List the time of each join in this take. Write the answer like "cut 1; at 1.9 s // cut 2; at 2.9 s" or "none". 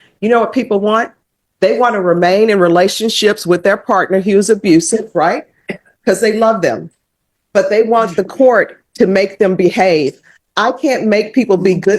none